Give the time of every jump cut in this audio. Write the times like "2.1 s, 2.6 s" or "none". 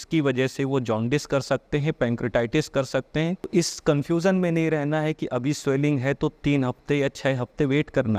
3.5 s